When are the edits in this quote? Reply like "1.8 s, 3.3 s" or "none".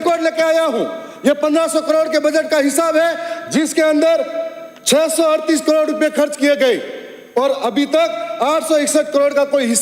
none

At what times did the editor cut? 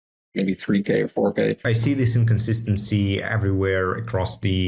1.6 s

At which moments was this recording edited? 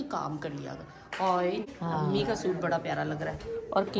1.7 s

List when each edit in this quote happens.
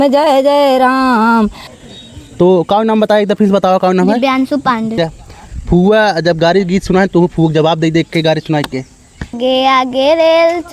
1.6 s, 5.0 s, 9.4 s

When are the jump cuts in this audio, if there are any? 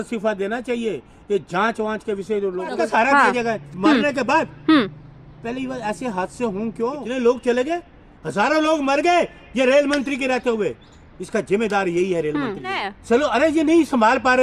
2.8 s, 7.0 s, 12.9 s

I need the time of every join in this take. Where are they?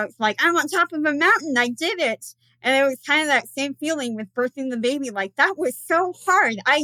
none

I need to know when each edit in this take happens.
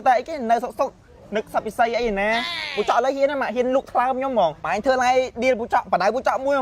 4.6 s

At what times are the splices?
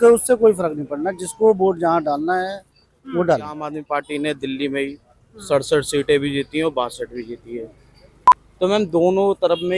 3.7 s

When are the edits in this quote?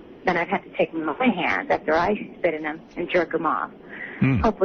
none

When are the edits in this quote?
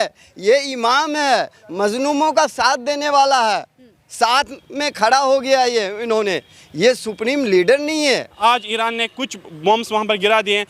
8.3 s

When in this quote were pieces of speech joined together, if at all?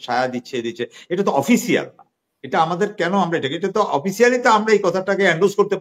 none

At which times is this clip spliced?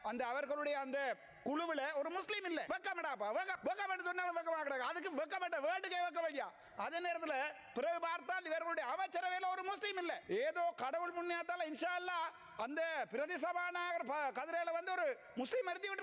2.7 s, 3.5 s, 10.2 s

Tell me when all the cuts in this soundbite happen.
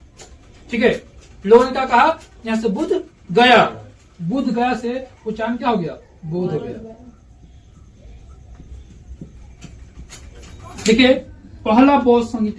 10.8 s

